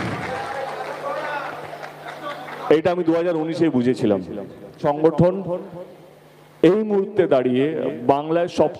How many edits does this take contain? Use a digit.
1